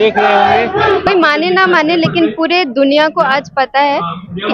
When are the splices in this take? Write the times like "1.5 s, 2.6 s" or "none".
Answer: 1.1 s